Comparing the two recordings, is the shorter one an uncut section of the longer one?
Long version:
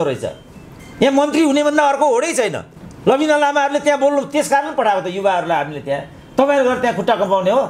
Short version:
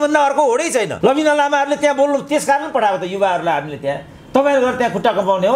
no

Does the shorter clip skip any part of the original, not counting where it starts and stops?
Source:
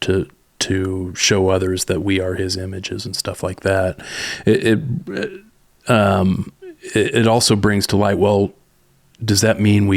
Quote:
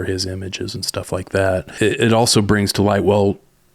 yes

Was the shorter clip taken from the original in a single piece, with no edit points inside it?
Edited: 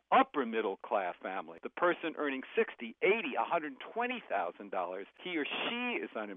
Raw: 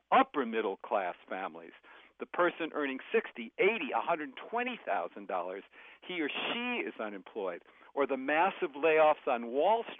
no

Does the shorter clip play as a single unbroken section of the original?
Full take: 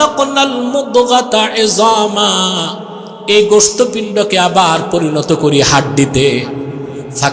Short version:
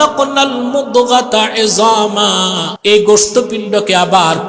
no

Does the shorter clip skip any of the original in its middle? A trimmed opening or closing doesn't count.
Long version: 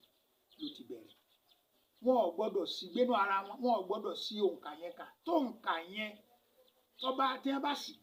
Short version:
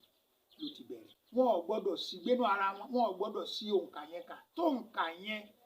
yes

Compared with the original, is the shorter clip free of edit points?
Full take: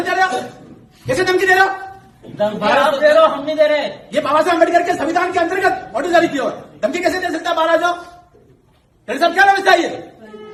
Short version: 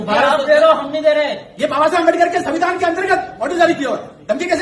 yes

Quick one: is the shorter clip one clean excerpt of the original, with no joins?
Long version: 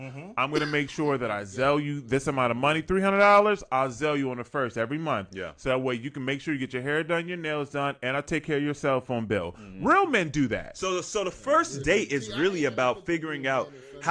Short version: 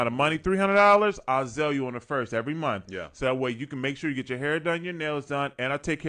yes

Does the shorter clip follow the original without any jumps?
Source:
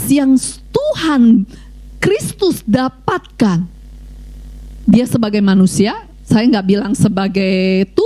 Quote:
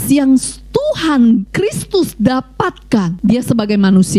no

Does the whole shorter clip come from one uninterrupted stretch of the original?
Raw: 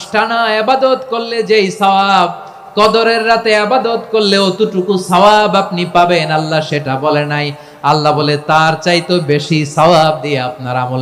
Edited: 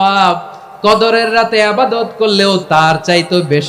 no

